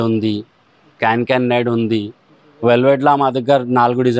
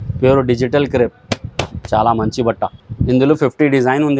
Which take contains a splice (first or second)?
second